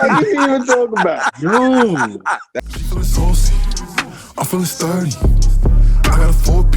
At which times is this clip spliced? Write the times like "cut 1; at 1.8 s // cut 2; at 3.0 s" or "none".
cut 1; at 2.5 s